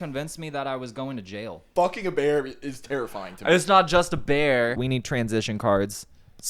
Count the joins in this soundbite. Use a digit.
2